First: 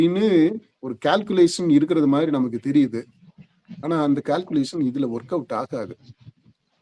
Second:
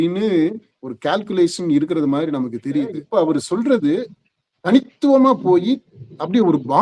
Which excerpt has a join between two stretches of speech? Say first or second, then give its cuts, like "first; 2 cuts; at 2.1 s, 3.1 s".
second; 1 cut; at 3.0 s